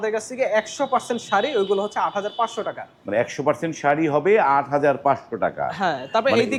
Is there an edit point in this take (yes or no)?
no